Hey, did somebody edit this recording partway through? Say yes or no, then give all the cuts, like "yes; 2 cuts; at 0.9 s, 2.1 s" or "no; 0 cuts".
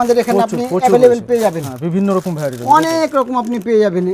no; 0 cuts